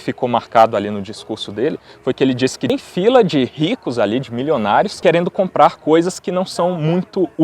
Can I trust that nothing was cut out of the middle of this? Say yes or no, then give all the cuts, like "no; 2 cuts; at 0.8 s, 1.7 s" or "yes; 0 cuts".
no; 1 cut; at 2.7 s